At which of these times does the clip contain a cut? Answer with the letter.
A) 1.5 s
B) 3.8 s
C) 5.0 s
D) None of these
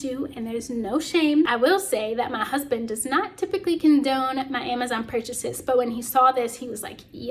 A